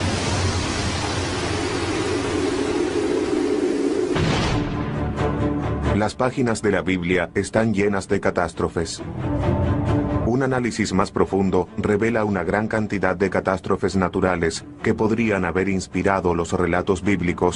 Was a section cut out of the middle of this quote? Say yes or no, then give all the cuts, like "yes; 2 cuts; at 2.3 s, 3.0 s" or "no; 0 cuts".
no; 0 cuts